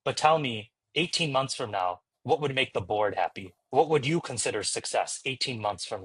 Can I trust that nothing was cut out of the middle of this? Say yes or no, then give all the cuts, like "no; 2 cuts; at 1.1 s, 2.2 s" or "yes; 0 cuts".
yes; 0 cuts